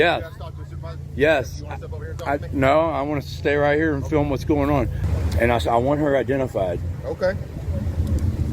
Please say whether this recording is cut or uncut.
cut